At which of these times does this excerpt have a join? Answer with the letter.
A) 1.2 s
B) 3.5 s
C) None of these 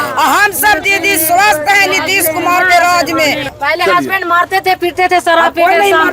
B